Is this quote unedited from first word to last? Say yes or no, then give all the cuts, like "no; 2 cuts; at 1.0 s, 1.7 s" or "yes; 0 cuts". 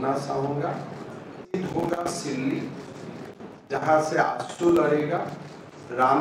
no; 1 cut; at 1.4 s